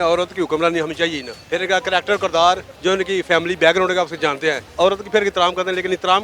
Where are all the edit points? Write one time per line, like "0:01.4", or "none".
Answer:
0:01.3
0:02.7
0:04.7